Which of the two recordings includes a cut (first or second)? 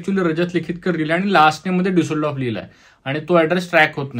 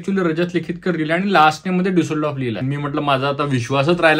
second